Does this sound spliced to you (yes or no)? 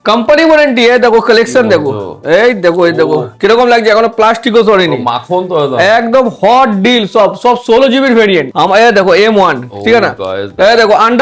yes